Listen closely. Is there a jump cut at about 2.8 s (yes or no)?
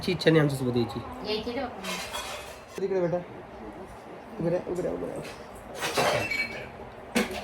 yes